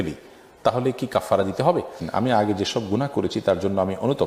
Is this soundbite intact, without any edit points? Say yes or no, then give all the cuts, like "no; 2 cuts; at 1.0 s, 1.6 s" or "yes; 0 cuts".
no; 1 cut; at 2.0 s